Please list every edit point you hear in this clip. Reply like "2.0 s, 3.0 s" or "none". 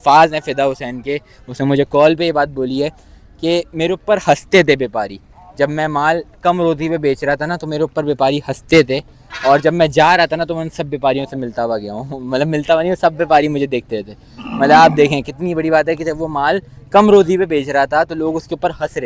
none